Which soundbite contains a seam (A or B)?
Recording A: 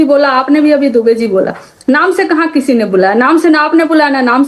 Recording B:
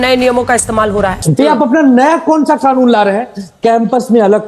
B